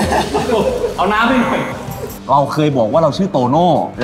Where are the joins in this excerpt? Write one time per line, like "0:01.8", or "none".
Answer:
0:02.2